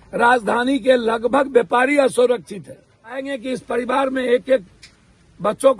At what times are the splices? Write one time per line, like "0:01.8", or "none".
0:03.2